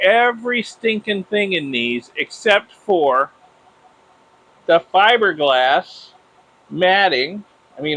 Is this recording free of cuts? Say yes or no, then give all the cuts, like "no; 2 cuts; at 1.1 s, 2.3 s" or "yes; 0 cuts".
yes; 0 cuts